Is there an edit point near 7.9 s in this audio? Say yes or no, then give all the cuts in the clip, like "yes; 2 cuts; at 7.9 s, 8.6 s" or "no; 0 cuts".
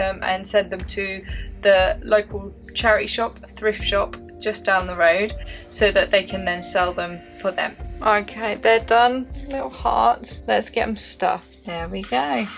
yes; 4 cuts; at 7.9 s, 9.4 s, 10.3 s, 11.6 s